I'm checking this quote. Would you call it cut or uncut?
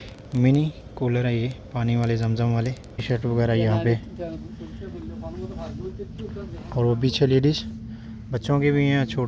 cut